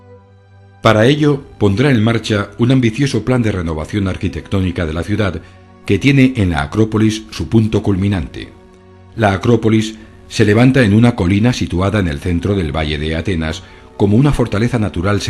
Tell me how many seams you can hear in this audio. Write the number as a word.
zero